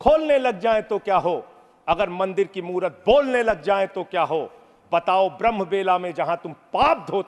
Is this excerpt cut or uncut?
uncut